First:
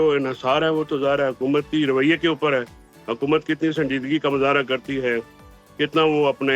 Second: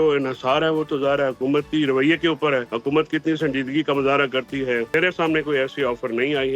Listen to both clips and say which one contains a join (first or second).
second